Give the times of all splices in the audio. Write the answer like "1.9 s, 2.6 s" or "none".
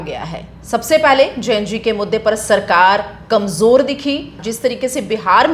4.4 s